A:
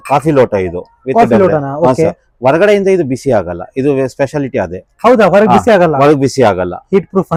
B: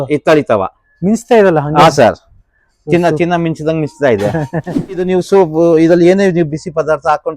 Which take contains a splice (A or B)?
B